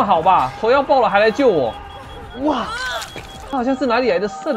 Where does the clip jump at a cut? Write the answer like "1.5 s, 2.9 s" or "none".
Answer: 3.3 s